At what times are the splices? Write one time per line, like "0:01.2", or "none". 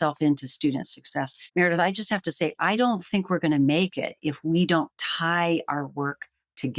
0:01.5